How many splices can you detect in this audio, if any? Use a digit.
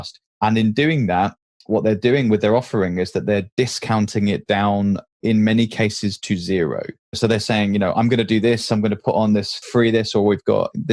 0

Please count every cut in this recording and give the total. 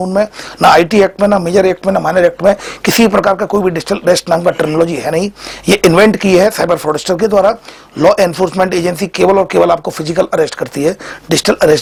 0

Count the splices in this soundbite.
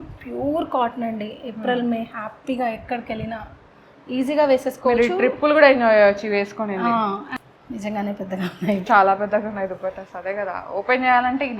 1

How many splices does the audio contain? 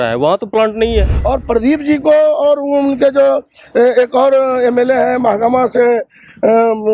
1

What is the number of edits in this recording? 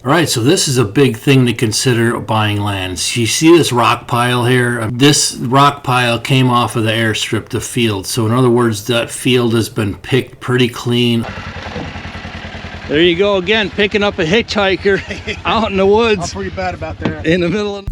2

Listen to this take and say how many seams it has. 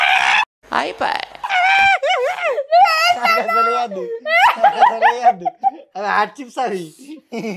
0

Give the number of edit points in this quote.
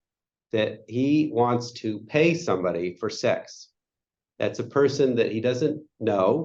0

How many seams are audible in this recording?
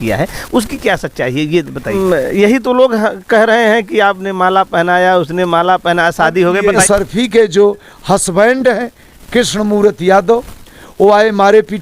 2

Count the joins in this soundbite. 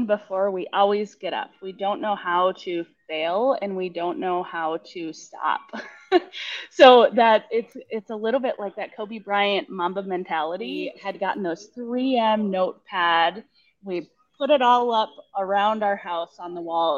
1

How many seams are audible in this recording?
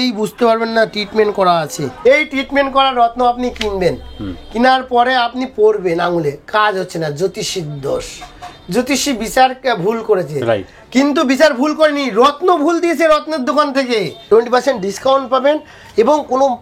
2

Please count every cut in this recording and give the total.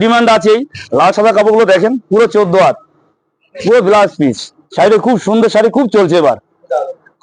0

